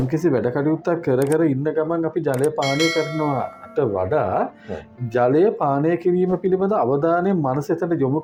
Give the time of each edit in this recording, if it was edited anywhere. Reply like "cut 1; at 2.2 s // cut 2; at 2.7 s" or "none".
none